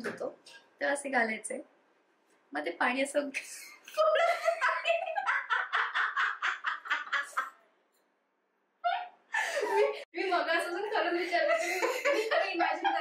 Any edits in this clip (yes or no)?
no